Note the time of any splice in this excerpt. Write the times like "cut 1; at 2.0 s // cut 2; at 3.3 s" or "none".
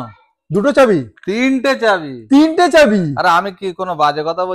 none

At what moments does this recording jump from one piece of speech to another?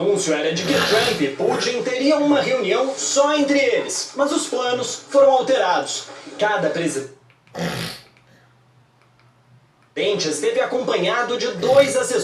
none

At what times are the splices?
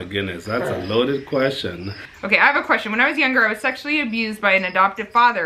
cut 1; at 2.1 s

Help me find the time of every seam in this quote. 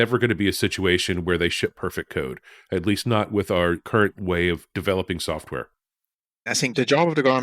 cut 1; at 4.0 s // cut 2; at 6.3 s

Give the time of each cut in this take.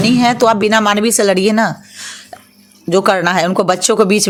none

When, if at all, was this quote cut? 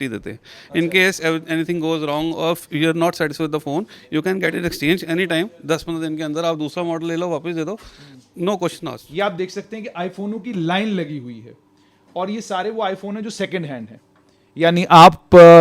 cut 1; at 9.0 s

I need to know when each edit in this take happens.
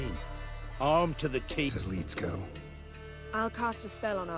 cut 1; at 1.7 s

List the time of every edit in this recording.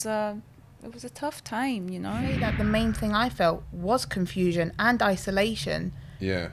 cut 1; at 2.5 s

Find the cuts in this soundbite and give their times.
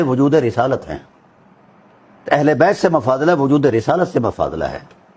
none

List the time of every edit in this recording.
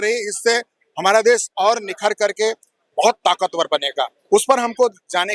none

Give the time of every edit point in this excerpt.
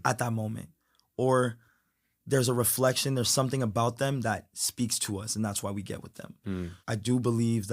cut 1; at 6.8 s

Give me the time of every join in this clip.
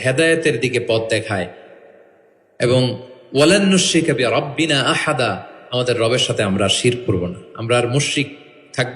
none

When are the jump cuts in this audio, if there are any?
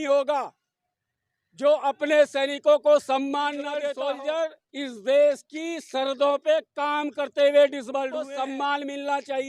cut 1; at 3.8 s // cut 2; at 8.3 s

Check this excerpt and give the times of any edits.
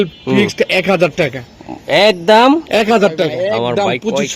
cut 1; at 3.4 s

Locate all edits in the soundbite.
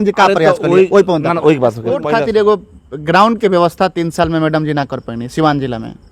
cut 1; at 1.9 s

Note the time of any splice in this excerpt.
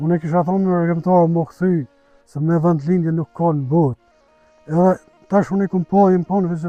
none

